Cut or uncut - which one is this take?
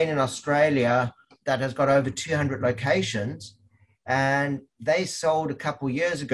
cut